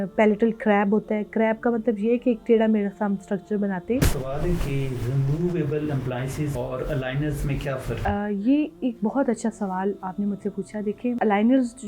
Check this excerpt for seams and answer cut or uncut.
cut